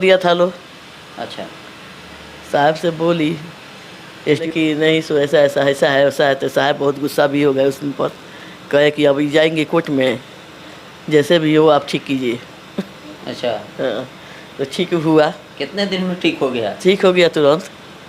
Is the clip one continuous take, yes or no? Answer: no